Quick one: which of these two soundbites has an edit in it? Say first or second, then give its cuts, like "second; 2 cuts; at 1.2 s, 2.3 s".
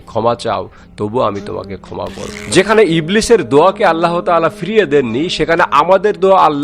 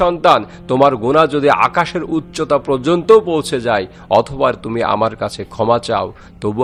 first; 1 cut; at 2.3 s